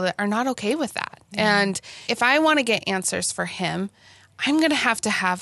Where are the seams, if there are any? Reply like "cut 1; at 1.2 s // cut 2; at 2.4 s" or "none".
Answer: cut 1; at 2.1 s